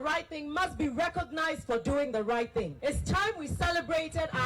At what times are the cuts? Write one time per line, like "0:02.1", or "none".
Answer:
0:02.7